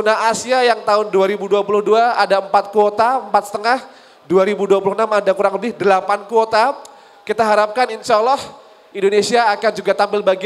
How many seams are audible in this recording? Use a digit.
0